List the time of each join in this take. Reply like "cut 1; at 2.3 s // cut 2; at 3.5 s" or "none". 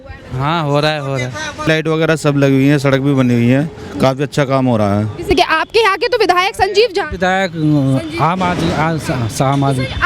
cut 1; at 1.7 s // cut 2; at 5.3 s